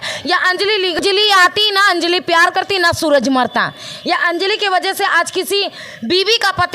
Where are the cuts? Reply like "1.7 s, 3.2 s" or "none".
1.0 s